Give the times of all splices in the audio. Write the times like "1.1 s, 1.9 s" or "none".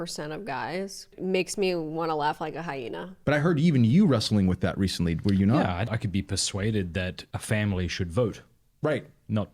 3.2 s, 5.9 s, 7.3 s